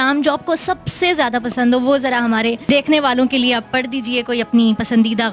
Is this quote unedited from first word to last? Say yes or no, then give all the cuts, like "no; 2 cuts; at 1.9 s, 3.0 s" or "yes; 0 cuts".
no; 1 cut; at 2.6 s